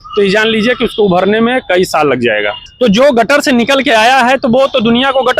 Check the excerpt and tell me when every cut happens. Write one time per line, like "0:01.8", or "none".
0:02.6